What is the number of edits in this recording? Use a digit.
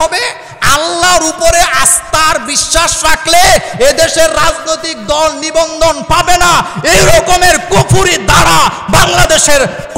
0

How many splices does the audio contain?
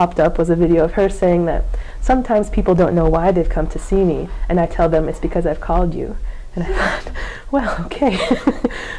0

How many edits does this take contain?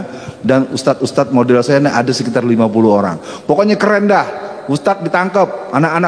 0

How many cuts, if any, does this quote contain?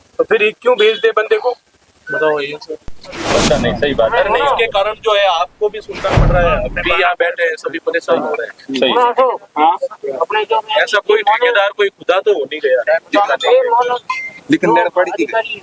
1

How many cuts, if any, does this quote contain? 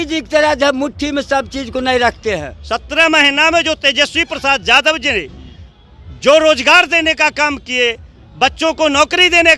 1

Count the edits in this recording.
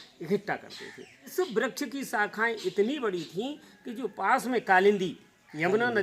1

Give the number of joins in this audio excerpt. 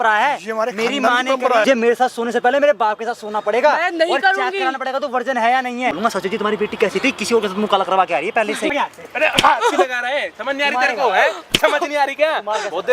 3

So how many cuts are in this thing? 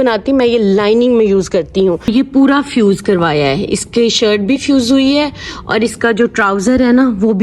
1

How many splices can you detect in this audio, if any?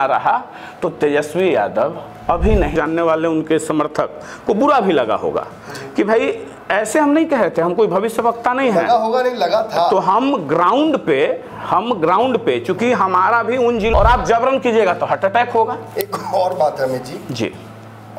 2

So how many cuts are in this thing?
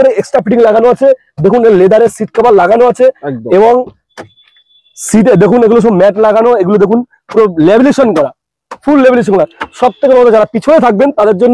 0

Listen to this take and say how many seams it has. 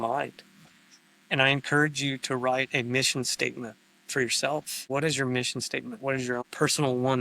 2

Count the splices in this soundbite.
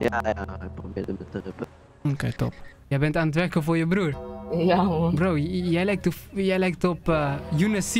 1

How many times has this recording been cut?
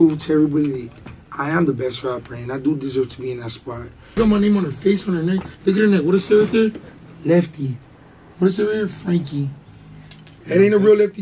2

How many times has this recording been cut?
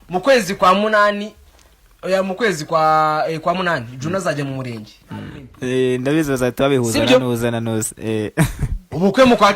1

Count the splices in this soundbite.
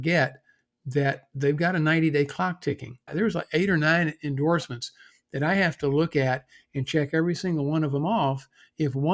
1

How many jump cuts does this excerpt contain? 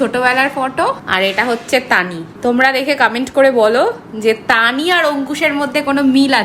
2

